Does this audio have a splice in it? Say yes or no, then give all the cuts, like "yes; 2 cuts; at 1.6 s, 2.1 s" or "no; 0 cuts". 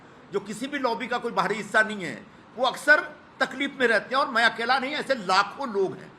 no; 0 cuts